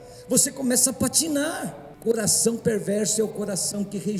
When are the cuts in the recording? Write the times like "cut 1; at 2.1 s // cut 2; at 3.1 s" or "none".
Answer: cut 1; at 1.8 s